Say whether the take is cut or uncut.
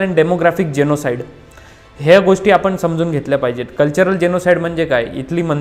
uncut